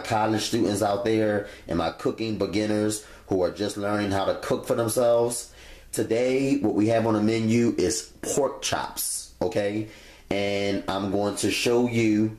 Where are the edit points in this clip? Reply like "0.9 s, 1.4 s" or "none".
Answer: none